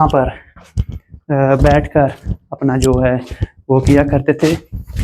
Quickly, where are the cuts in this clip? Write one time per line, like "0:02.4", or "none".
none